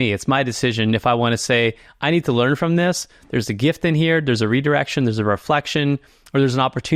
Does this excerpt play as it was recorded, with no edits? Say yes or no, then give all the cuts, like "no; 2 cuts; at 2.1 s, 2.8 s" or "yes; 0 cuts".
yes; 0 cuts